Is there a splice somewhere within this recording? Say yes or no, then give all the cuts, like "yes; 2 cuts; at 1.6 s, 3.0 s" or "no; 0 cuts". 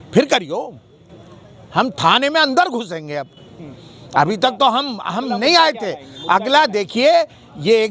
no; 0 cuts